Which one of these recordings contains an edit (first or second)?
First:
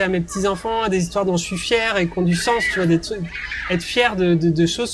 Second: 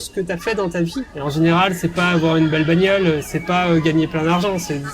second